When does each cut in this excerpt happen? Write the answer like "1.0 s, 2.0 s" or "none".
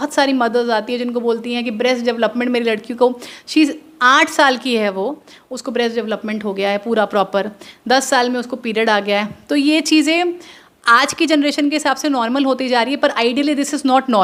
none